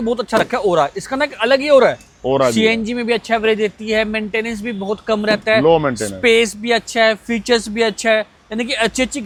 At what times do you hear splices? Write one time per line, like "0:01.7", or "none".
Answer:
none